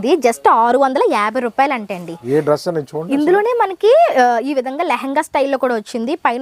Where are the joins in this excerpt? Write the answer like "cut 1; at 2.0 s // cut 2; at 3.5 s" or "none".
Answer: none

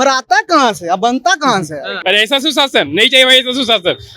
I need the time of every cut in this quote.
cut 1; at 1.9 s

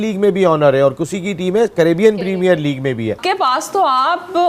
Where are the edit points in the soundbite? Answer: cut 1; at 3.2 s

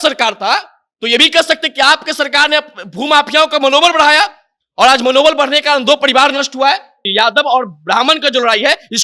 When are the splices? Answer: cut 1; at 7.0 s

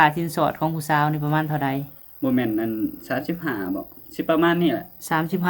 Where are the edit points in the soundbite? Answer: none

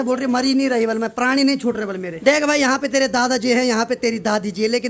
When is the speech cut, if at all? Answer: cut 1; at 2.1 s

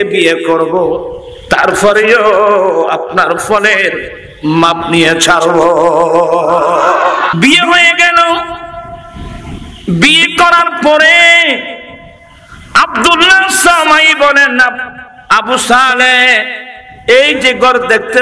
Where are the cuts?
cut 1; at 7.3 s

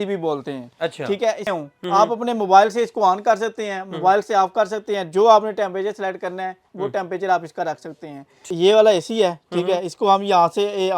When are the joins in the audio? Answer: cut 1; at 1.5 s // cut 2; at 8.5 s

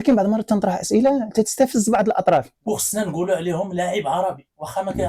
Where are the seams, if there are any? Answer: cut 1; at 2.5 s

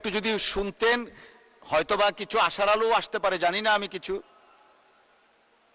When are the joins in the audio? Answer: none

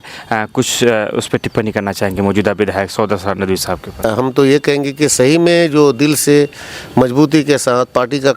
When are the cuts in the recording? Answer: cut 1; at 4.1 s

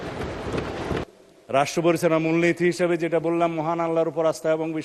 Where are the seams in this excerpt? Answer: cut 1; at 1.1 s

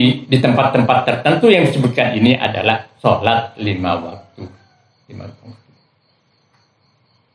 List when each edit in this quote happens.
none

